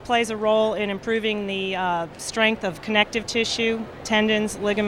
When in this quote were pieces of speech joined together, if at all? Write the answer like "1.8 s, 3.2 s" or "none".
none